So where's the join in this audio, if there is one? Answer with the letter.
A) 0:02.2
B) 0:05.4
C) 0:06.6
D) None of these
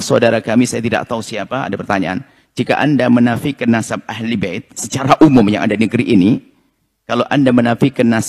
D